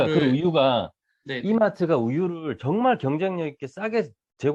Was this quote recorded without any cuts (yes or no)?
yes